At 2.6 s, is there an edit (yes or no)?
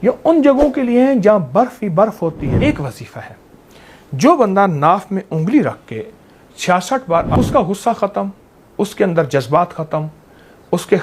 yes